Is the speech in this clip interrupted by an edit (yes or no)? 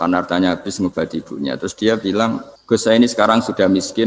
yes